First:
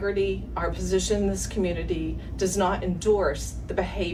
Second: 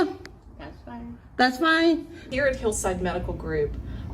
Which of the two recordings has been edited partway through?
second; 1 cut; at 2.2 s

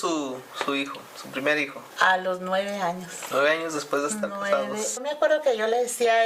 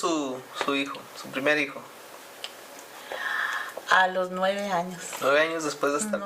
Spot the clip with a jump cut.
first; 2 cuts; at 1.8 s, 5.0 s

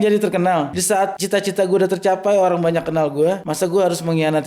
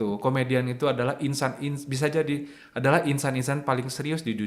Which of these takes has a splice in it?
first; 2 cuts; at 0.9 s, 3.5 s

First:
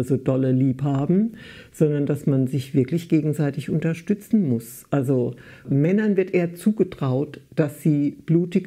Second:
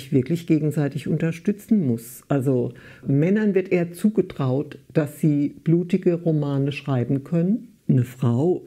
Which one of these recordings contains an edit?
second; 1 cut; at 7.7 s

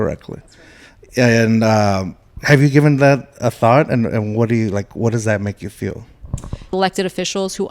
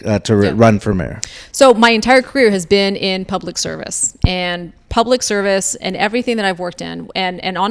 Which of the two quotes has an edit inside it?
first; 1 cut; at 6.7 s

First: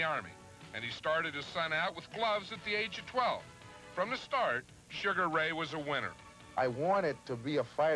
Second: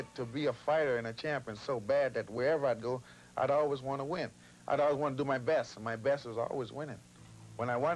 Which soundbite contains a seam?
first; 1 cut; at 0.9 s

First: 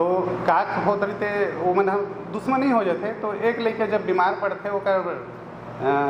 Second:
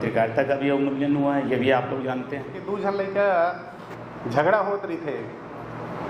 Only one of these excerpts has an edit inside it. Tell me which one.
second; 1 cut; at 2.6 s

